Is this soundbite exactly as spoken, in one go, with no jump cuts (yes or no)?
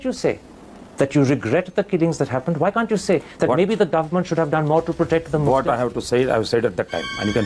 yes